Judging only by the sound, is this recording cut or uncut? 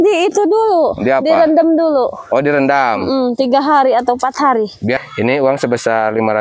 cut